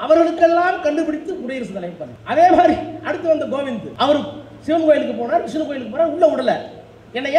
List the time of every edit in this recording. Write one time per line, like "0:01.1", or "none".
0:02.1
0:03.9